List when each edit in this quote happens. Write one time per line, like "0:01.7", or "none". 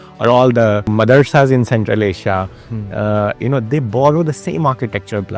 0:00.9